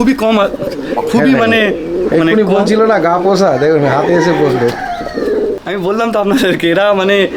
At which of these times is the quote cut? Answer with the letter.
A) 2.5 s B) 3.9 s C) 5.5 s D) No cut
C